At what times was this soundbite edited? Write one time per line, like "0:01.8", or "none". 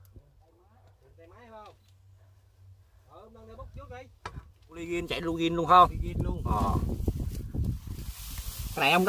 0:04.9

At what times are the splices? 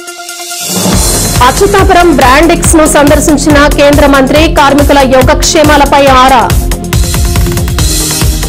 0:01.1

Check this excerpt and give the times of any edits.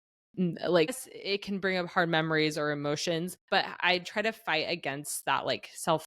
0:01.1
0:03.4

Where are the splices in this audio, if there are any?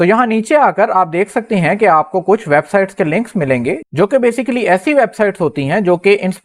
none

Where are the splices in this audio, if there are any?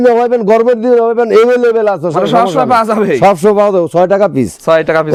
none

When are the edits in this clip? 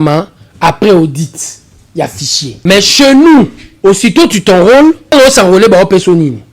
0:02.6
0:03.6
0:05.1

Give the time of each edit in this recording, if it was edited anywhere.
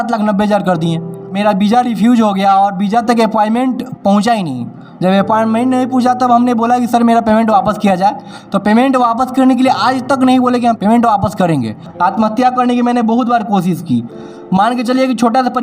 0:01.3
0:10.8
0:11.9

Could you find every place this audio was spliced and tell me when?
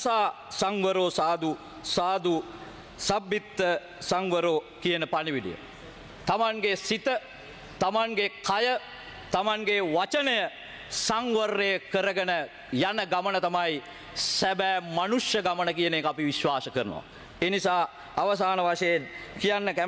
none

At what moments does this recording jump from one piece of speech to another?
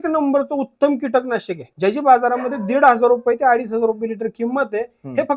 0:01.6

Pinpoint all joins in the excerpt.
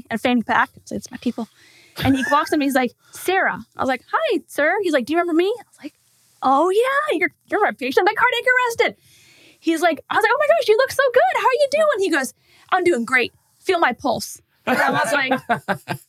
none

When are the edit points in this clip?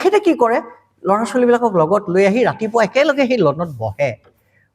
none

